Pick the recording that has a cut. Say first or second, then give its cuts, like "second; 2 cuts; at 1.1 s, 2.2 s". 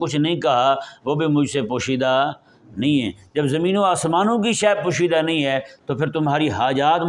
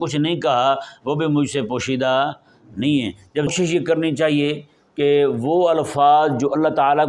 second; 1 cut; at 3.5 s